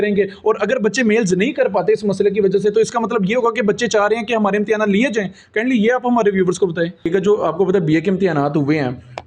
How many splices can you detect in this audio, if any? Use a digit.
1